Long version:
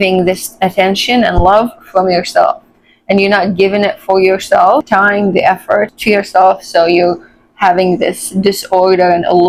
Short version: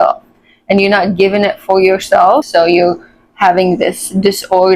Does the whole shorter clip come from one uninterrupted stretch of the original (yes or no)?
no